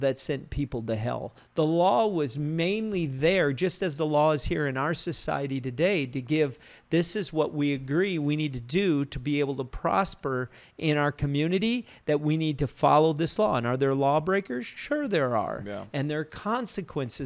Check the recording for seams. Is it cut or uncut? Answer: uncut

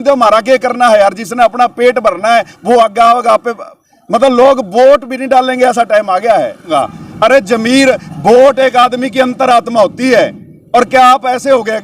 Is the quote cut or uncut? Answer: cut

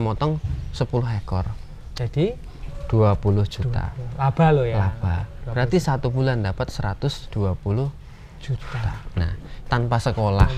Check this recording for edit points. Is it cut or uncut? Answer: uncut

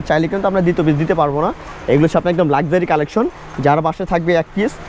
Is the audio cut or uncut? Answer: uncut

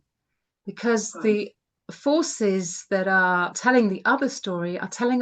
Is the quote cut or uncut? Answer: cut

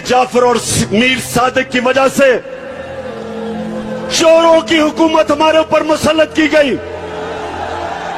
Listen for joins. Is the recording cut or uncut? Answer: uncut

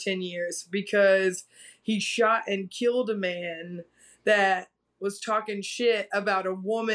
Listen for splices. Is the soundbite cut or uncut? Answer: uncut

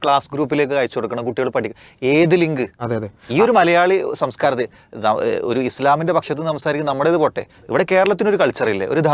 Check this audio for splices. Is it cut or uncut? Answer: uncut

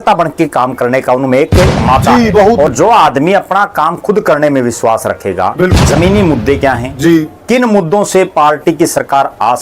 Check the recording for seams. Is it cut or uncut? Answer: cut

